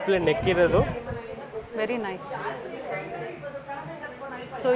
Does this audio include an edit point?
no; 0 cuts

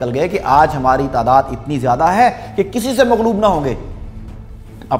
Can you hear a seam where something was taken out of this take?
no; 0 cuts

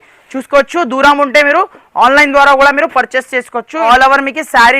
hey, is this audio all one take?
no; 1 cut; at 3.8 s

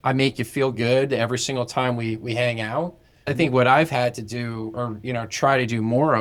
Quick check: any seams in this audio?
no; 0 cuts

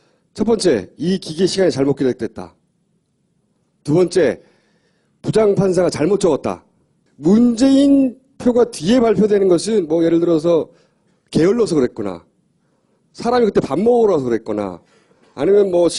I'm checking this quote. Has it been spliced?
no; 0 cuts

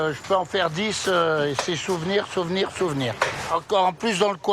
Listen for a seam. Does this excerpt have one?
yes; 1 cut; at 3.5 s

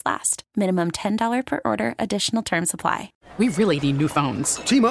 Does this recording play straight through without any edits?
no; 1 cut; at 3.1 s

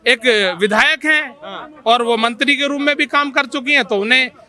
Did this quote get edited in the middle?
no; 0 cuts

